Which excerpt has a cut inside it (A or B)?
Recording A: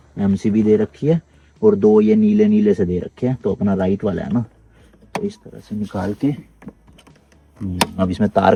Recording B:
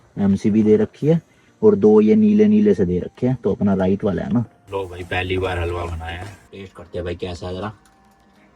B